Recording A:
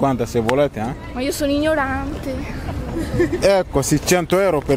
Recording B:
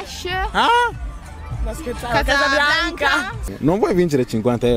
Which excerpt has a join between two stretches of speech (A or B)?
B